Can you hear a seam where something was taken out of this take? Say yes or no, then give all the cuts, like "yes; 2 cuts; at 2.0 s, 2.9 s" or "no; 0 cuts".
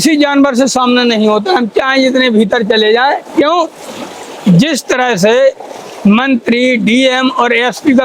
no; 0 cuts